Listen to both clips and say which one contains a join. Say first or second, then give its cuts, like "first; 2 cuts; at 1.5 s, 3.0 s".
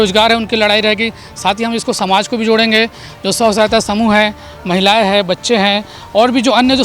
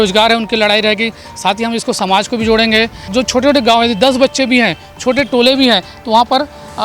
second; 1 cut; at 3.0 s